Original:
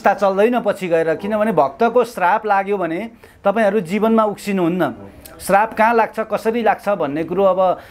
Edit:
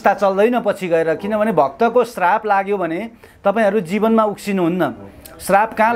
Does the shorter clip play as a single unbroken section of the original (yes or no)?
yes